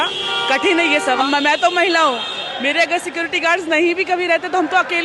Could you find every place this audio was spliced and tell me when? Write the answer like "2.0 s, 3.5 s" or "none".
1.2 s